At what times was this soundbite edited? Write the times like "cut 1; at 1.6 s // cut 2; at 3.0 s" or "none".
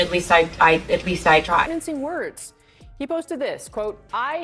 cut 1; at 1.7 s